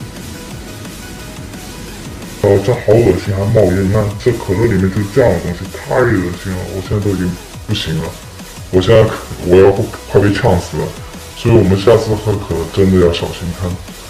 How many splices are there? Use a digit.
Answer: 1